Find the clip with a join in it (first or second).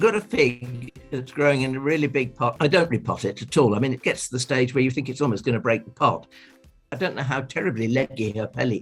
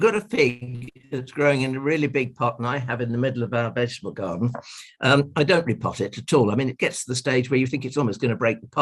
first